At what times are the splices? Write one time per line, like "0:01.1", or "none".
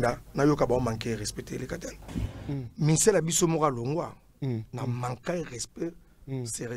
0:02.4